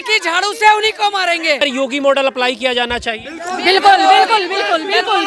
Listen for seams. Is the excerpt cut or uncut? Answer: cut